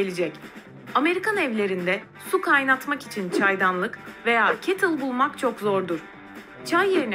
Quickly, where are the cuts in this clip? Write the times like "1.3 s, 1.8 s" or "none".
6.1 s